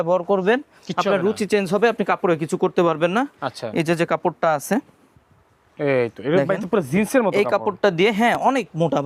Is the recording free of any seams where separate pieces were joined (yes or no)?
yes